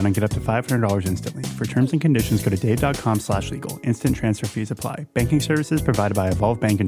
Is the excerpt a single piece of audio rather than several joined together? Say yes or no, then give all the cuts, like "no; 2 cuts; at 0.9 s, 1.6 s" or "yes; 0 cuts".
yes; 0 cuts